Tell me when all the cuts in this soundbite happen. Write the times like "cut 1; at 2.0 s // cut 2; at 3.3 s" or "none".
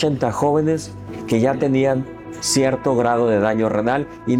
none